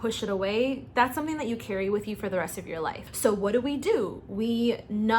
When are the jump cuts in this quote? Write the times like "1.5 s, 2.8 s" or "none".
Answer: 3.0 s